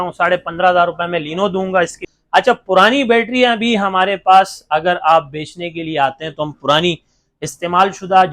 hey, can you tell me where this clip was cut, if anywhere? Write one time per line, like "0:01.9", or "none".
0:02.1

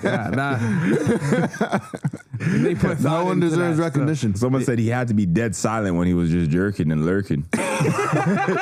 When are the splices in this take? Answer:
none

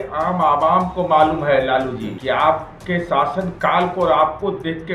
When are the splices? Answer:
0:02.2
0:02.7

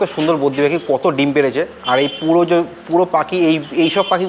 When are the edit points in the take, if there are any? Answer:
none

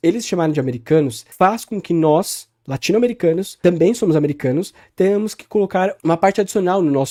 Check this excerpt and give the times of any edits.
none

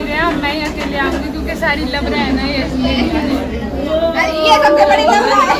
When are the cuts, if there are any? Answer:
none

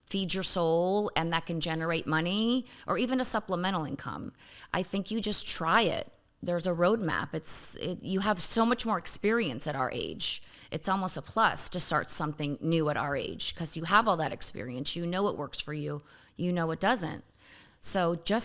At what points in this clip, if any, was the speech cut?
none

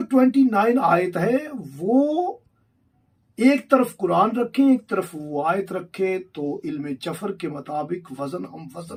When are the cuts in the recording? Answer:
none

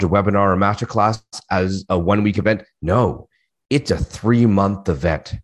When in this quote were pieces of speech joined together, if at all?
none

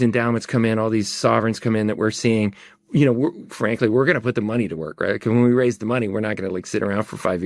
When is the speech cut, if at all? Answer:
none

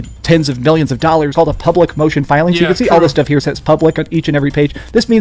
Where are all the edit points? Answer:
0:01.3

